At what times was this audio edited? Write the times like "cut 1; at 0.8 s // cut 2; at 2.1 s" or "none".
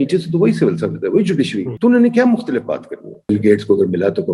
cut 1; at 1.6 s // cut 2; at 3.3 s